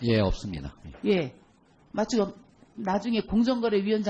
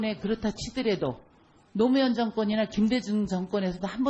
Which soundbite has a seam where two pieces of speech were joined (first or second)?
second